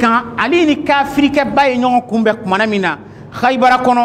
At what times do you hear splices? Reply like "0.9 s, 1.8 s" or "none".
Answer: none